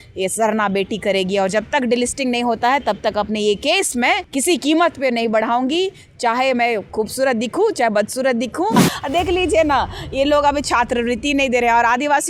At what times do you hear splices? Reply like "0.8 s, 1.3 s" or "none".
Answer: 4.3 s, 8.9 s